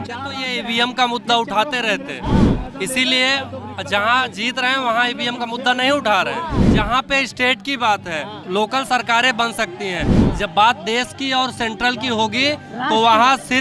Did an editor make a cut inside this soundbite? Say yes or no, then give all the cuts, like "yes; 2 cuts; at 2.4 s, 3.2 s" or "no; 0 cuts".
yes; 2 cuts; at 6.6 s, 8.3 s